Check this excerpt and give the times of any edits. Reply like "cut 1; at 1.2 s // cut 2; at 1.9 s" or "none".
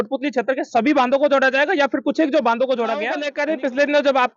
cut 1; at 3.3 s